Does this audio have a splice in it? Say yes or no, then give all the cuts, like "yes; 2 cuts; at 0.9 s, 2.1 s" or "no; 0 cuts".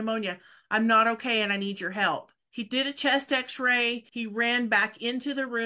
yes; 2 cuts; at 2.4 s, 4.1 s